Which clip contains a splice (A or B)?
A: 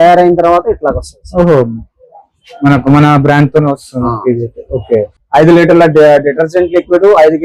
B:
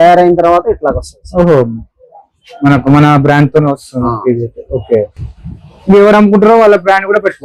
A